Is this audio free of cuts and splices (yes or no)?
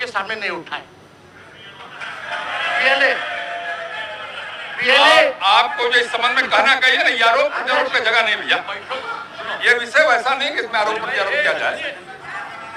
yes